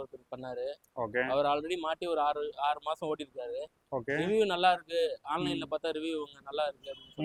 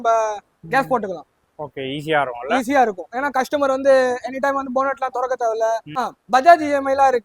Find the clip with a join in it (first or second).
second